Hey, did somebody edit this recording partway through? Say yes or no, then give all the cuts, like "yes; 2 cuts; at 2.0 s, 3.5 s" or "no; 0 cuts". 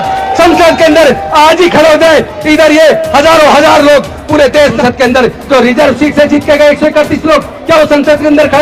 yes; 1 cut; at 4.8 s